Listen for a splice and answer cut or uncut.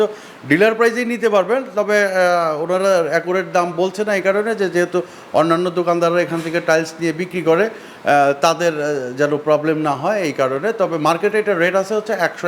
uncut